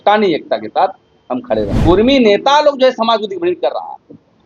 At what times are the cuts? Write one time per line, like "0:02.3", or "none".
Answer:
0:01.7